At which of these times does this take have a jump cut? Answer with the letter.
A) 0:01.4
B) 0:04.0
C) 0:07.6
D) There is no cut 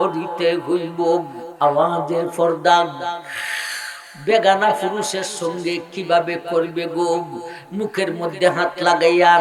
A